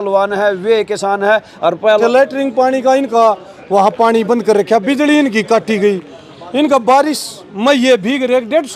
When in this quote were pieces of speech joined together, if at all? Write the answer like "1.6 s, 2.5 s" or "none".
2.0 s